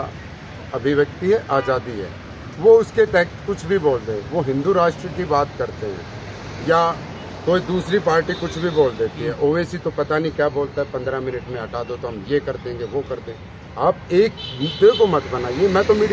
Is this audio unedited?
yes; 0 cuts

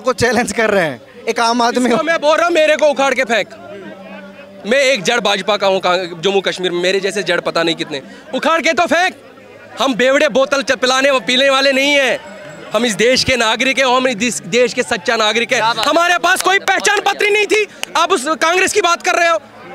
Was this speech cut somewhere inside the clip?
no; 0 cuts

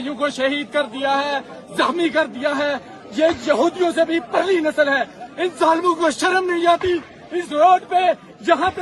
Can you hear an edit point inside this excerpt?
no; 0 cuts

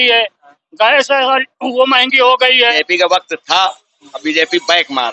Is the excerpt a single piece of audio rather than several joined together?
no; 1 cut; at 2.7 s

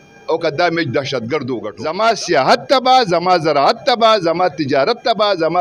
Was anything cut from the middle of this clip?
yes; 1 cut; at 1.7 s

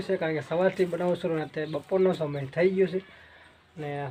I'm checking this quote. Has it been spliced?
no; 0 cuts

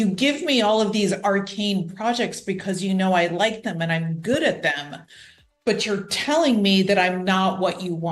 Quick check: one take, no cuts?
yes; 0 cuts

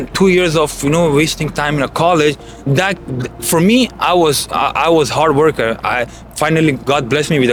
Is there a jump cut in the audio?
no; 0 cuts

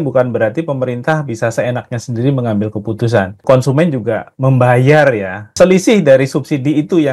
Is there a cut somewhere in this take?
yes; 2 cuts; at 3.4 s, 5.5 s

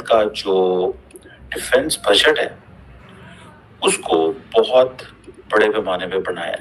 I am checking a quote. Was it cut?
no; 0 cuts

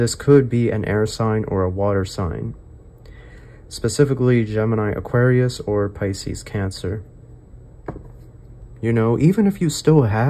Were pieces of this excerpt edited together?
yes; 1 cut; at 8.6 s

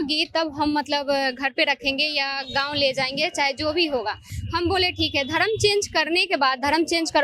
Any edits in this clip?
no; 0 cuts

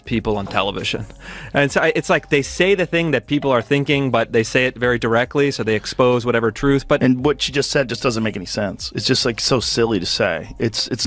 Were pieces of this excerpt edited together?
yes; 1 cut; at 7.0 s

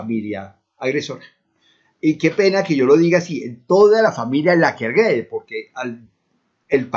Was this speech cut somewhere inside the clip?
yes; 1 cut; at 4.4 s

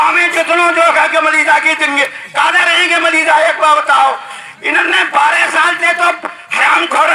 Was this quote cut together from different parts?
no; 0 cuts

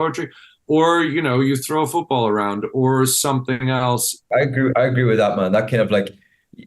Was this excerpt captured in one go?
no; 1 cut; at 4.2 s

